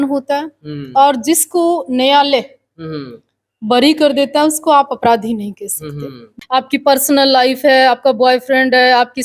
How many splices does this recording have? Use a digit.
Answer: 1